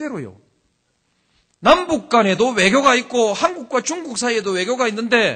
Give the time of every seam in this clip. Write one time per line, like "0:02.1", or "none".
0:01.2

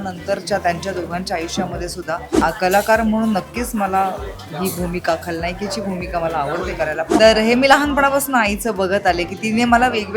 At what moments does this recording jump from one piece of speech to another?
0:02.3
0:07.2

